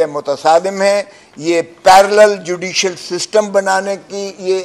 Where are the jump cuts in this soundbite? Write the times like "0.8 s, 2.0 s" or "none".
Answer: none

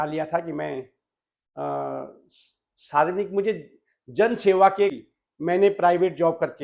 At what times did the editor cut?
4.9 s

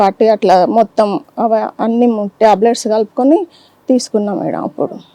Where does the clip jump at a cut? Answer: none

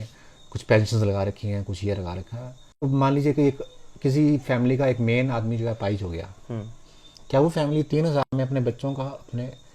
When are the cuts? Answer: 2.9 s

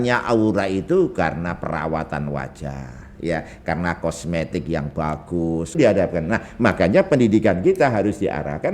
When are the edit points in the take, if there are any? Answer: 5.8 s

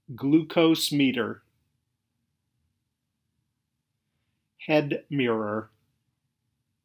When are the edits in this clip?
none

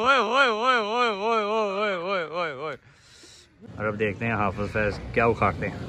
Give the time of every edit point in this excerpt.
3.6 s

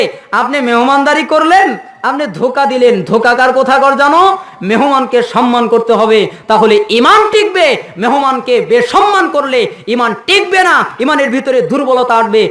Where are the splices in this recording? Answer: 10.9 s

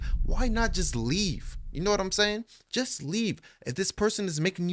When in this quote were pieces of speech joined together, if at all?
none

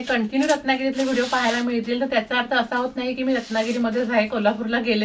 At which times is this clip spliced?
none

